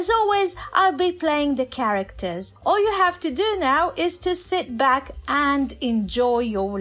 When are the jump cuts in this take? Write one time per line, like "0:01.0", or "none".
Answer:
0:02.5